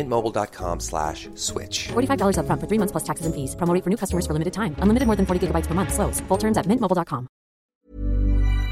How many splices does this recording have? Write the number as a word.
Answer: one